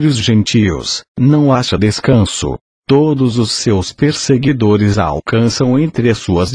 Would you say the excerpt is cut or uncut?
cut